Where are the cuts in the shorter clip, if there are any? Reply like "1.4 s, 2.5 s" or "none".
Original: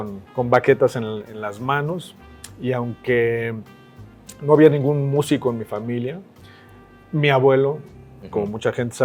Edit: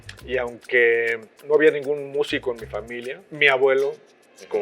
1.3 s, 3.3 s